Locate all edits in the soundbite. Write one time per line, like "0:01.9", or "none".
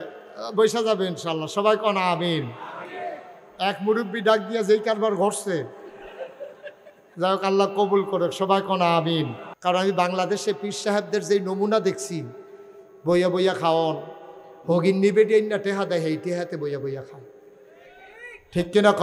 0:09.4